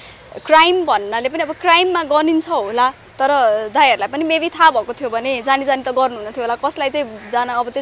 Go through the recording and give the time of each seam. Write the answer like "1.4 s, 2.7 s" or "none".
none